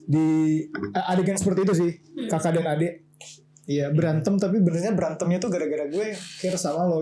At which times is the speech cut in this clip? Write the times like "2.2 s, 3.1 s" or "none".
none